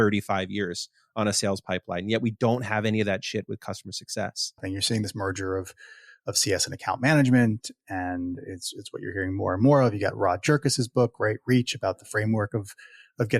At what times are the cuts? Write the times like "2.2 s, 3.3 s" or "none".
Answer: 4.7 s